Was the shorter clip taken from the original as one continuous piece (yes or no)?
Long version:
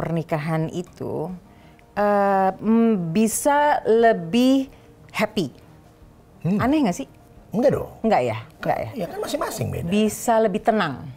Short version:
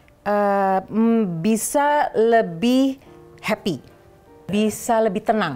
no